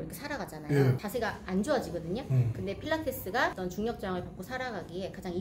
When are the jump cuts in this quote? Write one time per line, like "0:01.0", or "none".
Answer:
0:01.0